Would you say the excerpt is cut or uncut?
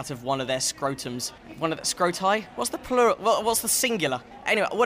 uncut